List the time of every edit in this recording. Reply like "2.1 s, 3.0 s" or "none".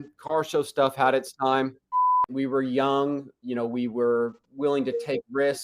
2.3 s